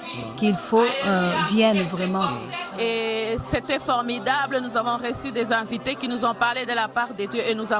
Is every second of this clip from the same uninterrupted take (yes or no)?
no